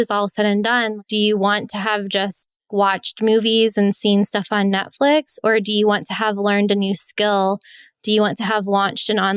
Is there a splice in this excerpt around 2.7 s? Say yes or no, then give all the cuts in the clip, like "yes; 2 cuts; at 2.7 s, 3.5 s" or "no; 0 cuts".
yes; 2 cuts; at 0.9 s, 2.7 s